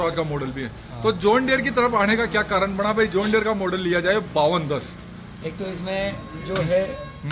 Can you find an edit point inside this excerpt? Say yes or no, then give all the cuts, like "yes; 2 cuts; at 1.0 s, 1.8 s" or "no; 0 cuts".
no; 0 cuts